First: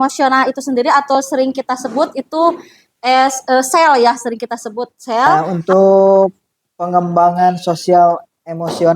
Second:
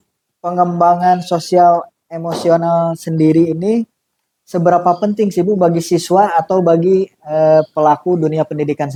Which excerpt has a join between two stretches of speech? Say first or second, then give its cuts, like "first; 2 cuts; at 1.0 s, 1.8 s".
first; 1 cut; at 5.3 s